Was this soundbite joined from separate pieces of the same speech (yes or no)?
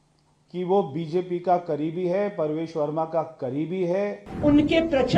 yes